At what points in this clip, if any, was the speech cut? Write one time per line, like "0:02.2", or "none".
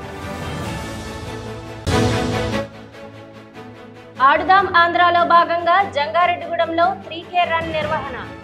0:01.0